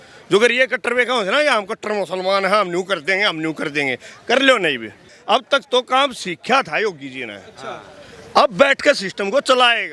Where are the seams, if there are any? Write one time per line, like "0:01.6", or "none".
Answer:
0:05.1